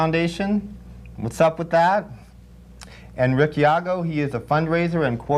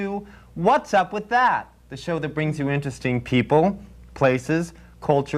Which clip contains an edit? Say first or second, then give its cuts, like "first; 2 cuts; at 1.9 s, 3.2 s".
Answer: second; 1 cut; at 3.2 s